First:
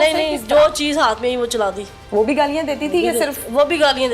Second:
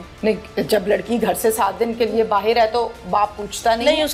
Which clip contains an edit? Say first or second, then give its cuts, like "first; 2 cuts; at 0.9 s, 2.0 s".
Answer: first; 1 cut; at 1.9 s